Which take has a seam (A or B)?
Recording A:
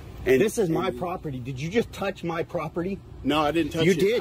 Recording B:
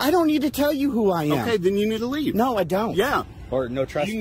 B